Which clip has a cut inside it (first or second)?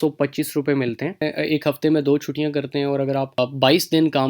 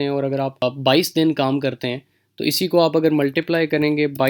first